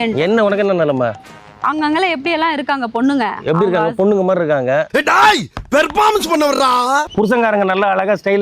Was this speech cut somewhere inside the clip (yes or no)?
yes